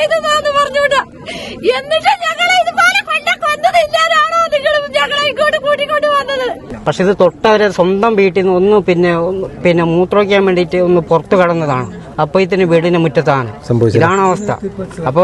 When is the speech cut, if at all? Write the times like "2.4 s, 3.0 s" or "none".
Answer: 6.7 s

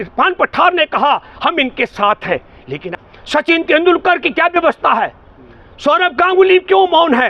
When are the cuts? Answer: 2.8 s

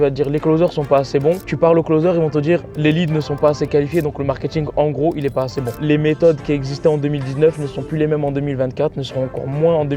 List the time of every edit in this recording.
5.7 s

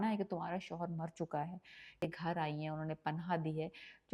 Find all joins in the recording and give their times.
2.1 s

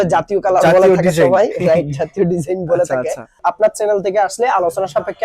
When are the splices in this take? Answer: 3.4 s

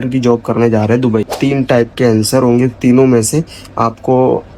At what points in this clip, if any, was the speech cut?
1.3 s

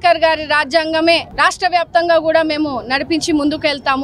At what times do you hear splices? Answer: 1.3 s

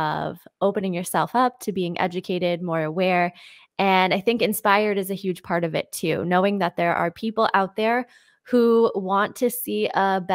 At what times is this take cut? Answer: none

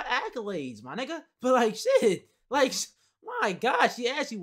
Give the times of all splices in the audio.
none

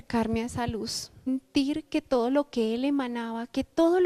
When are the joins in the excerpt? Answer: none

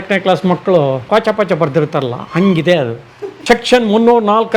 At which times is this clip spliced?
1.0 s, 3.4 s

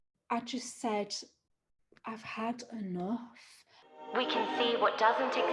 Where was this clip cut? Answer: 3.8 s

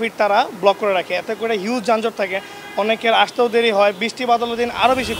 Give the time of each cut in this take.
none

